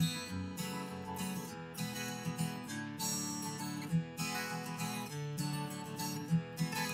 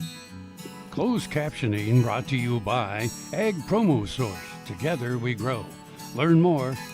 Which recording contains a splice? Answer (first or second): second